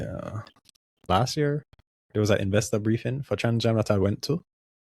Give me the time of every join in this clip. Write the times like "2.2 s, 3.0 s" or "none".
1.1 s